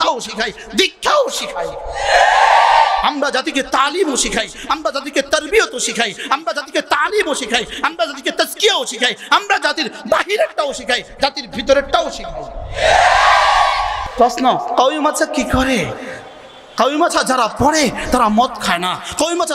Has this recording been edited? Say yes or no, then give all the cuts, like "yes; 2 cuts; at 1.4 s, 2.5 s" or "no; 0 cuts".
no; 0 cuts